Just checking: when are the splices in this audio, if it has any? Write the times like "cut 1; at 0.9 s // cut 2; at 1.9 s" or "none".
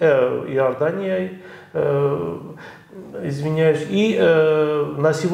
none